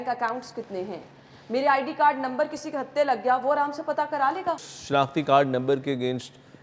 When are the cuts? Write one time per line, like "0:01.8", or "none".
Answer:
0:04.7